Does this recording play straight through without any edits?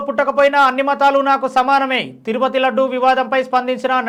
yes; 0 cuts

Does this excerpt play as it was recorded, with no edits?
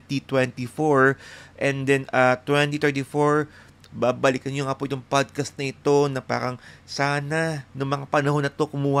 yes; 0 cuts

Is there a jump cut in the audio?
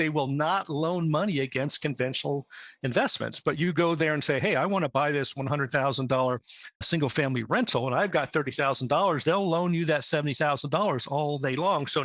no; 0 cuts

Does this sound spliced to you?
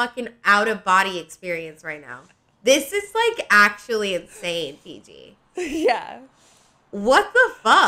no; 0 cuts

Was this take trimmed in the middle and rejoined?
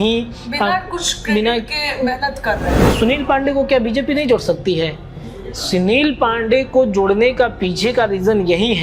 yes; 1 cut; at 2.9 s

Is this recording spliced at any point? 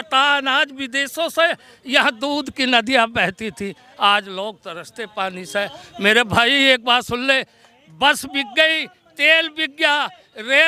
no; 0 cuts

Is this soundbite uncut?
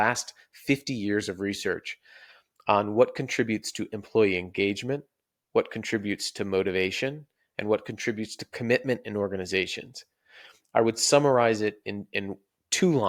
yes; 0 cuts

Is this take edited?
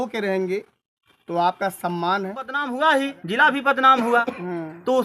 yes; 1 cut; at 2.6 s

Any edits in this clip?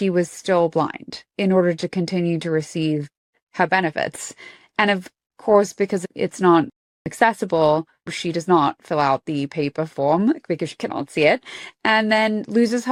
no; 0 cuts

